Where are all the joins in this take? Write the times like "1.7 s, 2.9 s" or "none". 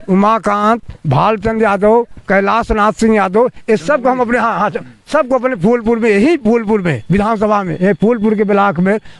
none

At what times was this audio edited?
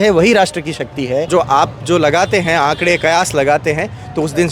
1.3 s

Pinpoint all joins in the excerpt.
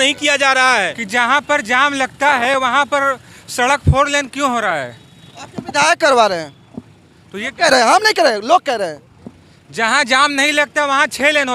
1.0 s

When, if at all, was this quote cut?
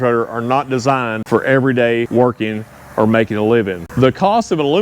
1.2 s, 2.1 s, 3.8 s

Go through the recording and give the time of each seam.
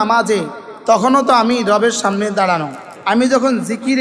2.8 s

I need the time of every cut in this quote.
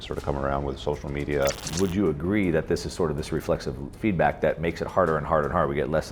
1.7 s

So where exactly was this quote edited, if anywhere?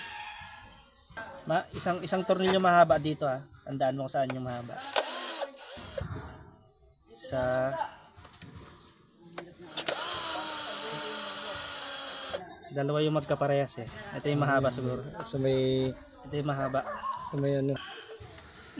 1.2 s, 5.8 s, 17.9 s

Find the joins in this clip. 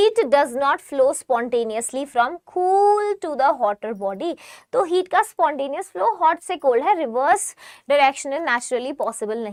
none

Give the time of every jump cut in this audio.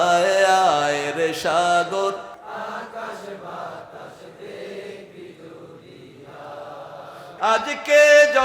2.4 s, 7.3 s

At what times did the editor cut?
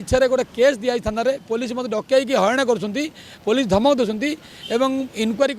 none

